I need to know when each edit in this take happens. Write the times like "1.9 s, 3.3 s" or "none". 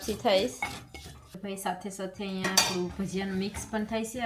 1.5 s